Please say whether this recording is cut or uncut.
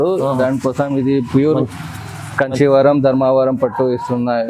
uncut